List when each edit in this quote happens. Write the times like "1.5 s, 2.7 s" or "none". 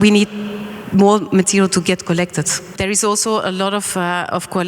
2.8 s